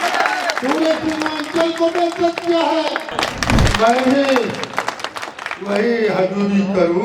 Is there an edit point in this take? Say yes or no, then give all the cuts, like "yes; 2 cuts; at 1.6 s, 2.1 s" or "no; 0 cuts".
yes; 1 cut; at 3.1 s